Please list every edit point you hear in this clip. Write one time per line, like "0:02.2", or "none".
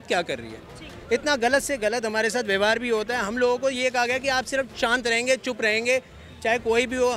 none